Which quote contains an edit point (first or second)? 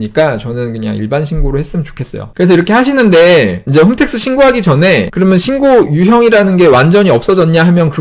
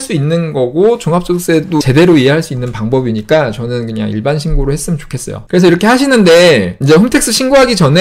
second